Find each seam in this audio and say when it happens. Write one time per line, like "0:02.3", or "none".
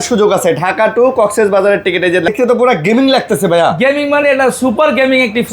0:02.3